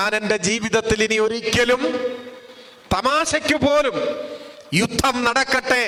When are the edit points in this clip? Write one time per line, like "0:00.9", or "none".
none